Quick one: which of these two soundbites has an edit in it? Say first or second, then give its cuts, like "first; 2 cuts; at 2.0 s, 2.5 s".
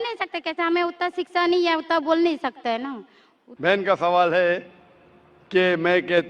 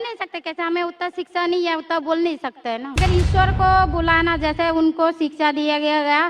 second; 1 cut; at 3.0 s